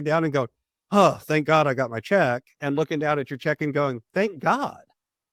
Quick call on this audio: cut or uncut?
uncut